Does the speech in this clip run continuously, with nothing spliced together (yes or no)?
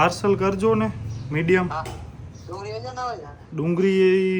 yes